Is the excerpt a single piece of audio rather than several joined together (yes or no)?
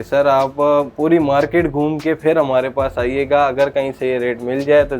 yes